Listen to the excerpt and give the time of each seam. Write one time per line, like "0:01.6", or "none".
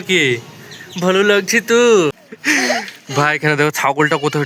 0:02.3